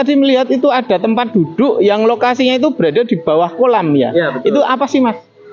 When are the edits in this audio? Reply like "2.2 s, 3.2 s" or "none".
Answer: none